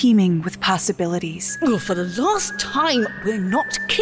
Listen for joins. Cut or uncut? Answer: cut